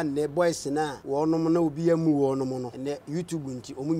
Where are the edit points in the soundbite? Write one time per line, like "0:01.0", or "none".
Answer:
0:01.0
0:02.7